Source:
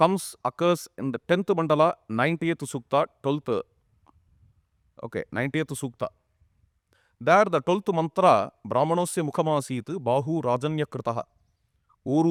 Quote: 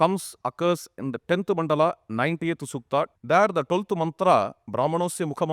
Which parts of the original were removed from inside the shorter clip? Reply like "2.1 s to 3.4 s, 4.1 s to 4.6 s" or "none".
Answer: 3.2 s to 7.1 s